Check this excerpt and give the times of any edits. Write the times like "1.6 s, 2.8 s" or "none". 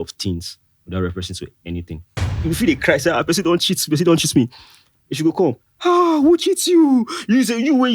2.3 s